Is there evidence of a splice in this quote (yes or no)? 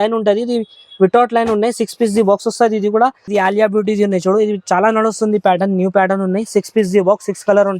yes